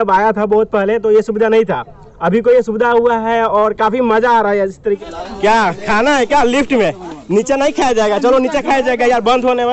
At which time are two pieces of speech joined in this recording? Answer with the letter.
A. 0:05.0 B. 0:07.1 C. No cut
A